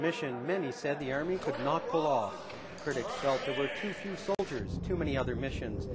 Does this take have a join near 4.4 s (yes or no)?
yes